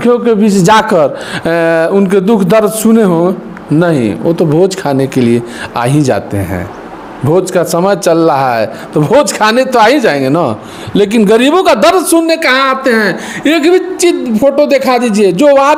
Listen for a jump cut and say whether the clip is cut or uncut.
uncut